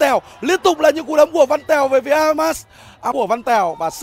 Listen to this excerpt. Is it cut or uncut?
cut